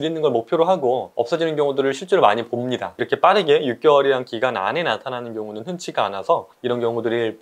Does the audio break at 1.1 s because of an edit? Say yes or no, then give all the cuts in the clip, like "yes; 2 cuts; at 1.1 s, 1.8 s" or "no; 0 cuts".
yes; 3 cuts; at 1.1 s, 3.0 s, 6.5 s